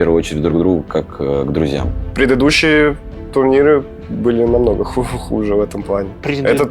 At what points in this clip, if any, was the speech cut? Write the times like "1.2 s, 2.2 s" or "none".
2.0 s